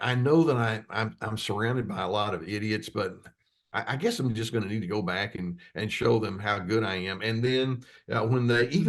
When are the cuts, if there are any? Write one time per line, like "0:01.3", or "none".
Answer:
none